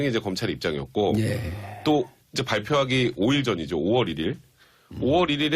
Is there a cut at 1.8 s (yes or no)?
no